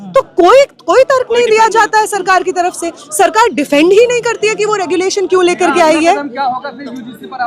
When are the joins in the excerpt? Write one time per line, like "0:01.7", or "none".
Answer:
none